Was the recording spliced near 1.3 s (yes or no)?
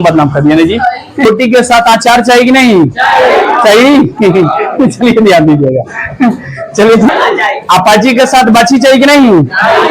yes